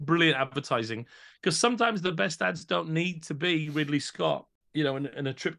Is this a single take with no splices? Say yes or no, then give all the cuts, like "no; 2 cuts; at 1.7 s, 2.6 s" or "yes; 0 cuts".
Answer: no; 1 cut; at 4.6 s